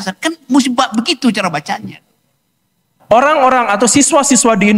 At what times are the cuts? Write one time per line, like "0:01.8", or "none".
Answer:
0:02.9